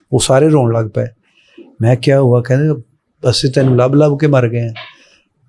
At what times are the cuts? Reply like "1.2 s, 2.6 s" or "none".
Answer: none